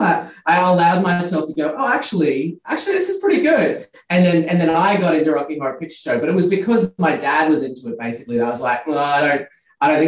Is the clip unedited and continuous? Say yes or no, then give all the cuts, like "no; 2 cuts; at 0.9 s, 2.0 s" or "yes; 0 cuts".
yes; 0 cuts